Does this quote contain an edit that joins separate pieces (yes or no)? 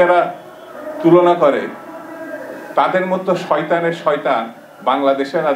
no